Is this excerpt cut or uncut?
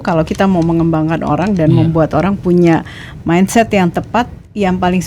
uncut